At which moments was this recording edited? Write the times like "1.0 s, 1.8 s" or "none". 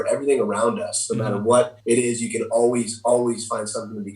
1.8 s